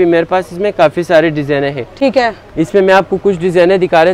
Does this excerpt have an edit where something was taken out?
no; 0 cuts

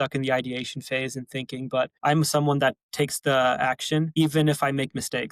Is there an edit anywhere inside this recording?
yes; 3 cuts; at 1.9 s, 2.8 s, 4.1 s

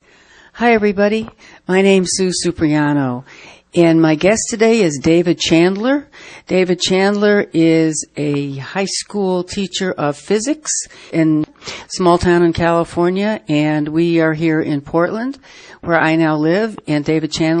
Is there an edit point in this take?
no; 0 cuts

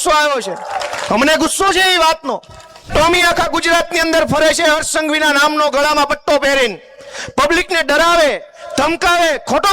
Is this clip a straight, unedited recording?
no; 1 cut; at 2.9 s

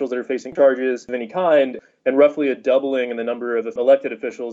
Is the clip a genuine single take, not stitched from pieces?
yes; 0 cuts

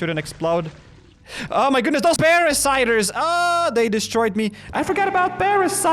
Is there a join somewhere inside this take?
yes; 1 cut; at 2.2 s

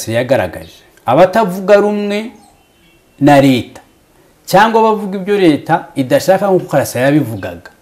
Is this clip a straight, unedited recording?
yes; 0 cuts

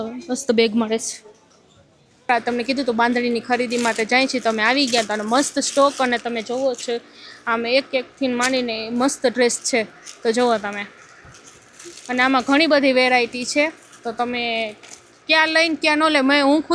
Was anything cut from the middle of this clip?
yes; 1 cut; at 2.3 s

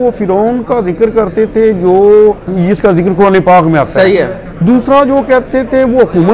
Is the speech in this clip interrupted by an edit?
yes; 1 cut; at 2.5 s

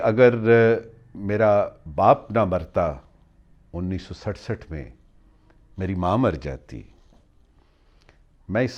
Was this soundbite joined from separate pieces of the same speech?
no; 0 cuts

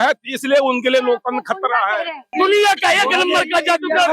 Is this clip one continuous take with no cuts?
no; 1 cut; at 2.3 s

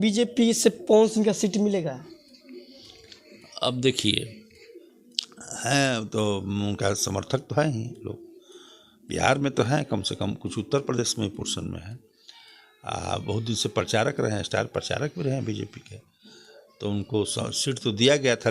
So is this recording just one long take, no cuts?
yes; 0 cuts

